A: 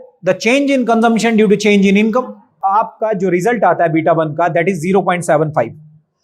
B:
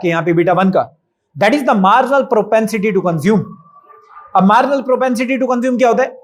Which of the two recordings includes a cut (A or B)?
A